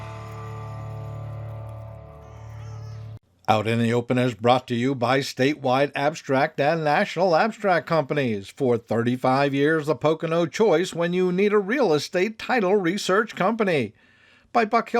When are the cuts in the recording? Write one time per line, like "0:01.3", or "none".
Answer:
0:03.3